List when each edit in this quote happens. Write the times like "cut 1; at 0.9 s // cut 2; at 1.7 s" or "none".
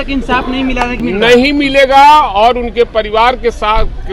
cut 1; at 1.0 s

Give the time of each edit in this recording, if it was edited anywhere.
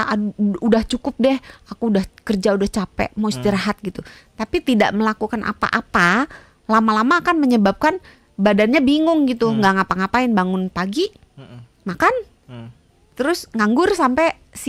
none

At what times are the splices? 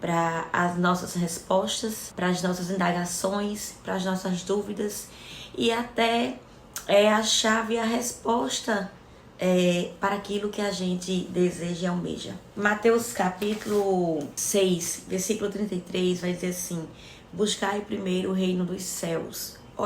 cut 1; at 2.1 s // cut 2; at 14.4 s

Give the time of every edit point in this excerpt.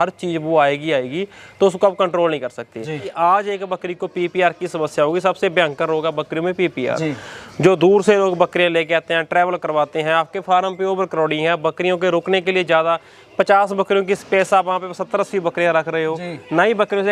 cut 1; at 3.0 s

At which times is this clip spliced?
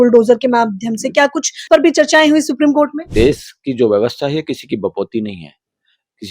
cut 1; at 1.6 s // cut 2; at 3.0 s

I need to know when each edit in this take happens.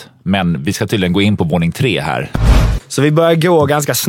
cut 1; at 2.5 s

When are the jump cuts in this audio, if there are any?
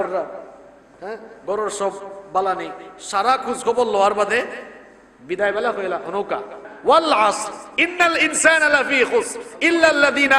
cut 1; at 6.7 s

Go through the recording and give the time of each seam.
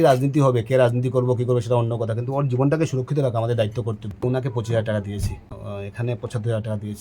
cut 1; at 4.1 s

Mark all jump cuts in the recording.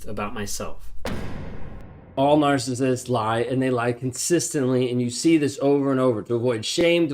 cut 1; at 2.1 s

